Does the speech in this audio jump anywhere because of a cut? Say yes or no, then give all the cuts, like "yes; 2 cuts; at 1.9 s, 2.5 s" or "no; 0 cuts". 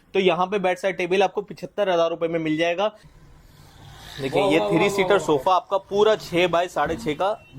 yes; 1 cut; at 3.0 s